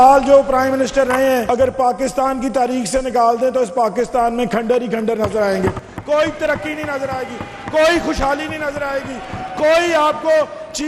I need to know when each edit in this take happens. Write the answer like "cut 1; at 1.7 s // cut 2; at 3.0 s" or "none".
cut 1; at 1.4 s